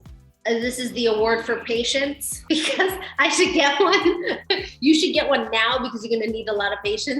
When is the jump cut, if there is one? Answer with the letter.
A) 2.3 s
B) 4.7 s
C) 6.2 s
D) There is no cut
A